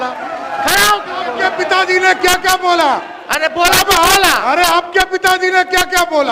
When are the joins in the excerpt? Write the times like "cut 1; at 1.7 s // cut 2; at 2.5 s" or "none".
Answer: cut 1; at 1.3 s